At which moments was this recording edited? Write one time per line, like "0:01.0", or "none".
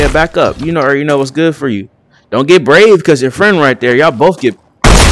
none